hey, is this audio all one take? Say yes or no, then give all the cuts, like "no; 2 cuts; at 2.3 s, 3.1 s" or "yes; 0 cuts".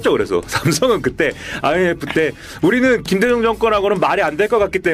no; 1 cut; at 3.0 s